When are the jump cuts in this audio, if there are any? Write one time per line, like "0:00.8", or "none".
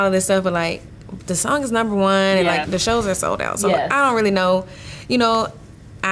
0:02.7